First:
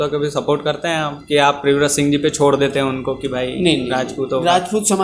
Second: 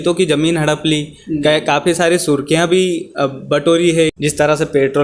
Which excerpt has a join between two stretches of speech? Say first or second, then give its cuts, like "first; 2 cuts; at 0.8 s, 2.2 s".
second; 1 cut; at 4.1 s